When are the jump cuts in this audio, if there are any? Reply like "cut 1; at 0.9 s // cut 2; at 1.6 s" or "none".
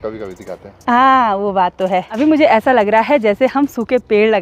cut 1; at 2.1 s